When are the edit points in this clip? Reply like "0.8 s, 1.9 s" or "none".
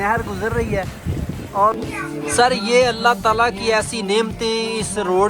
1.7 s